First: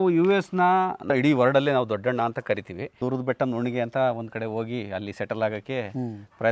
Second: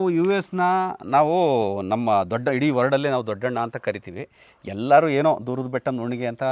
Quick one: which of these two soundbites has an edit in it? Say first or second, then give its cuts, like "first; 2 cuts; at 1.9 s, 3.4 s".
first; 2 cuts; at 1.0 s, 3.0 s